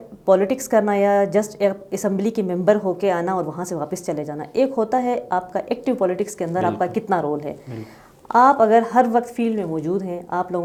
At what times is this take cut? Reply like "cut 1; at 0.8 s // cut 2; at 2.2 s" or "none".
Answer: none